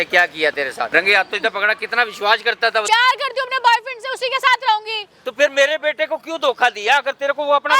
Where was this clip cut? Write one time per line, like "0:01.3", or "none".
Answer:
0:00.9
0:02.9